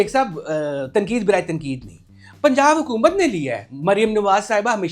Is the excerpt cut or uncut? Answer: uncut